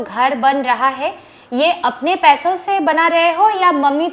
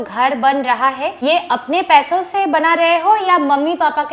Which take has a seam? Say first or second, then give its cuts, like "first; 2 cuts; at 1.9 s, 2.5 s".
second; 1 cut; at 1.1 s